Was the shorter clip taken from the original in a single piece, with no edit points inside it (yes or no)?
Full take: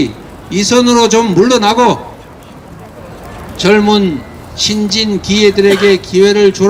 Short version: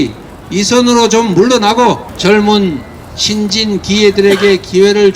no